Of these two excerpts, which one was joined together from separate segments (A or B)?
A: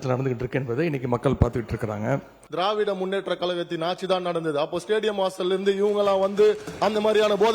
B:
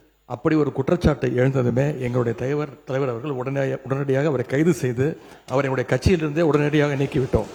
A